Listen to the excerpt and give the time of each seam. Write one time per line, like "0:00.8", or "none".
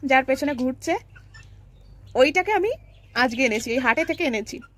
none